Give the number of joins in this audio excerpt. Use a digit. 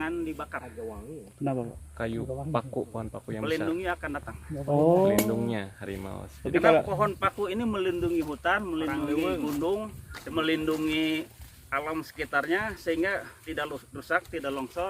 0